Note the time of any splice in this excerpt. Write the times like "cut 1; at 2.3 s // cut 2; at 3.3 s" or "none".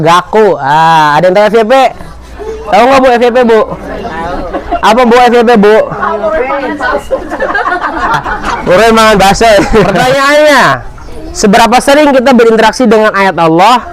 cut 1; at 9.9 s